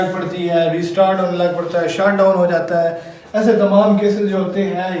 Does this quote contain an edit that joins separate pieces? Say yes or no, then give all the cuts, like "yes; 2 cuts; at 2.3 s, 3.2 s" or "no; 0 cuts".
no; 0 cuts